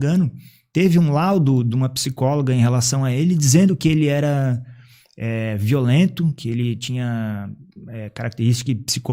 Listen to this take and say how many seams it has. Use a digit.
0